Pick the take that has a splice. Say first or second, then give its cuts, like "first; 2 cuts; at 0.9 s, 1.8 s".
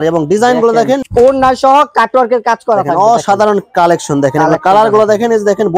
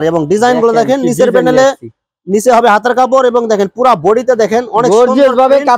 first; 1 cut; at 1.0 s